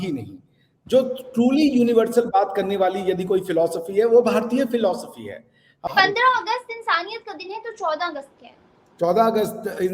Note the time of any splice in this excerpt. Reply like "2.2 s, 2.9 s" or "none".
5.9 s